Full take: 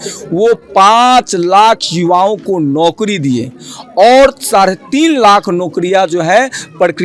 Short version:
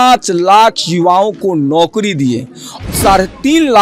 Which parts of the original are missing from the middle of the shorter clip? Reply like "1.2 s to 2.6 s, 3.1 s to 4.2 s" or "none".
3.9 s to 4.4 s